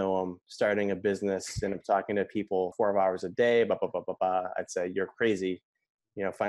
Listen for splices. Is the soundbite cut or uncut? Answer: cut